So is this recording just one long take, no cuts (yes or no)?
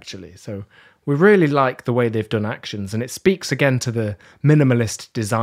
yes